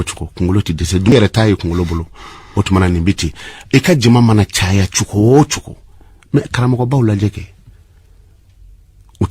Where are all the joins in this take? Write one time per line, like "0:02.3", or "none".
0:01.1